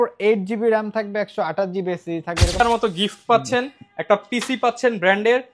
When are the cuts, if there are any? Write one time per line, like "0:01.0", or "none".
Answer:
0:02.6

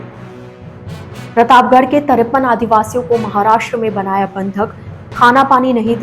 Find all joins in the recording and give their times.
0:01.3

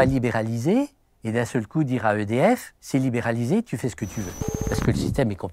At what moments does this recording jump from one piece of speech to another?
0:02.7
0:04.5

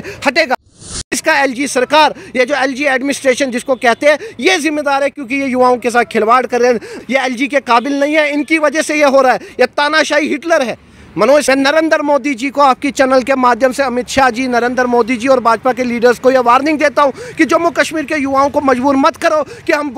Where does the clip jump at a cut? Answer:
0:00.8
0:07.0
0:11.4

